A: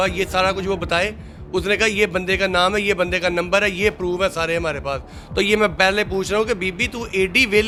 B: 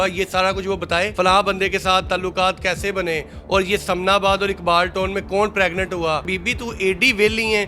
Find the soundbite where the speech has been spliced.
B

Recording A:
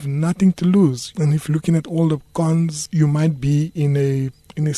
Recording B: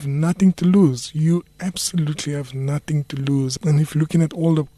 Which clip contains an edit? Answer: A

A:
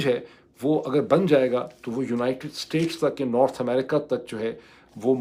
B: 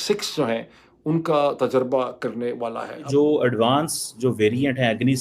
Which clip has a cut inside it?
B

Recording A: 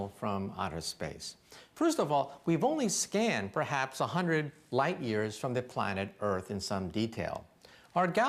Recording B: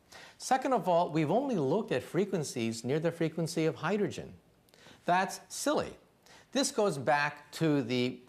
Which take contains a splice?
A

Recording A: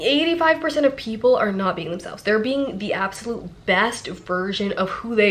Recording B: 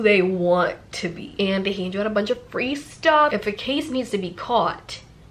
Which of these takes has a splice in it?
B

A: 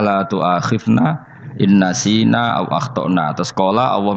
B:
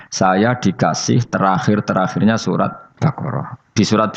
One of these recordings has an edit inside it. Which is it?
B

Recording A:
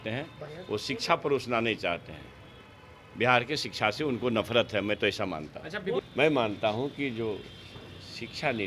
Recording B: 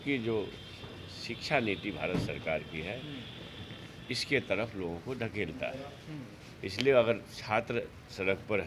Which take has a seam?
A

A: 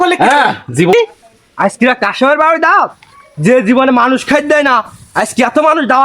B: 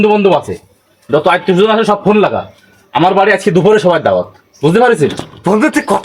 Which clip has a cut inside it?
A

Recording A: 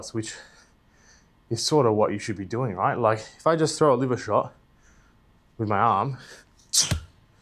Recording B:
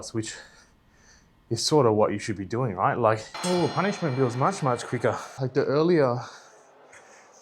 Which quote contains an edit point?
B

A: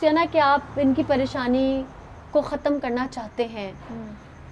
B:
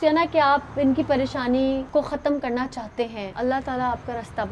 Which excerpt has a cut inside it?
B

